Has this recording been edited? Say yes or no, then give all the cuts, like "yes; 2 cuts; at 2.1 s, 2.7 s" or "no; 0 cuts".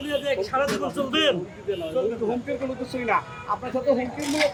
no; 0 cuts